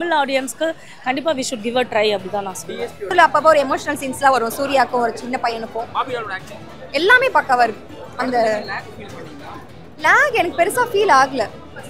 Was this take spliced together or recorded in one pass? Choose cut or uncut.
cut